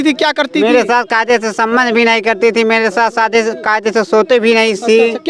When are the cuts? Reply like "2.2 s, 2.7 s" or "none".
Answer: none